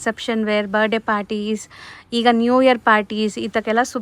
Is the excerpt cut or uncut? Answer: uncut